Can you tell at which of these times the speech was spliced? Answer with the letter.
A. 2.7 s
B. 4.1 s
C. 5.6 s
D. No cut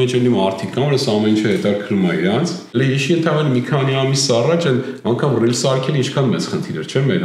A